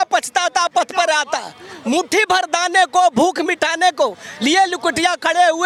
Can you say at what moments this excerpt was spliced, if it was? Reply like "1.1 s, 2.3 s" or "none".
none